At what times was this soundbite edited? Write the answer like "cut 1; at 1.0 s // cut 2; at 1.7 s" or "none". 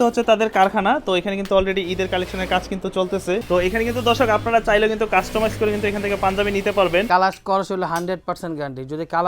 cut 1; at 3.4 s // cut 2; at 7.1 s